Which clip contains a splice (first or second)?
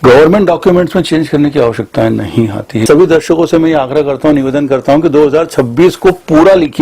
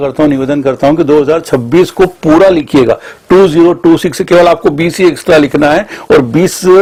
first